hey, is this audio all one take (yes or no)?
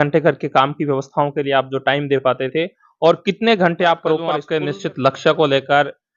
no